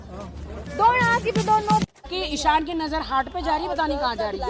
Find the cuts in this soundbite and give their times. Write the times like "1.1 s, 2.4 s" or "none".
2.0 s